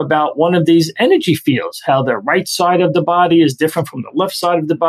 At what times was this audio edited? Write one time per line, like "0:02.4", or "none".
none